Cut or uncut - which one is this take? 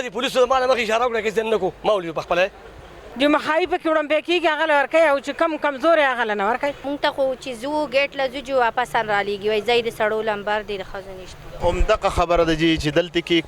uncut